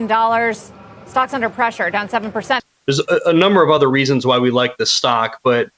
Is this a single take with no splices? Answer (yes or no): no